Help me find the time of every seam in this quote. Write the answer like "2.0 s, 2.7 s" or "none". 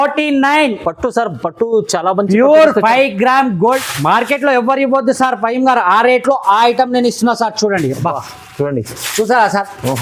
3.8 s